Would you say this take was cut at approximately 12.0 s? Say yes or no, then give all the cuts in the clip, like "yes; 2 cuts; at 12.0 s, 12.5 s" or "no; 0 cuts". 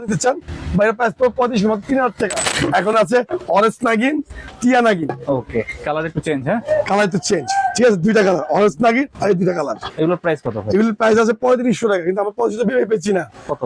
no; 2 cuts; at 2.5 s, 9.9 s